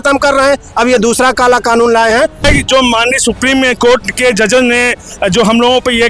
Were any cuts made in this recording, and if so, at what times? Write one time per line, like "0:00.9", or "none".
0:02.4